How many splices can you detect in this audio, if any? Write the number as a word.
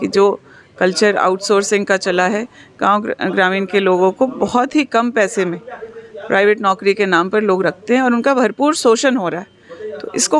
zero